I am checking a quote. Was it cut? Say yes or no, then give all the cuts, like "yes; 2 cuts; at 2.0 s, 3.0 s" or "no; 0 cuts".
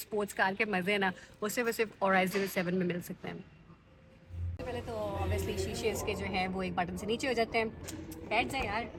no; 0 cuts